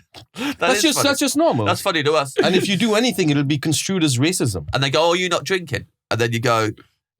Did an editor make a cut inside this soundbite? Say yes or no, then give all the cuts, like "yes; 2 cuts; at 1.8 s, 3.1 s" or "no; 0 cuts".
yes; 2 cuts; at 2.3 s, 4.6 s